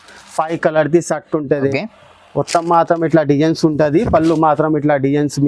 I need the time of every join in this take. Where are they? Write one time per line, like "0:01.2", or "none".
0:01.7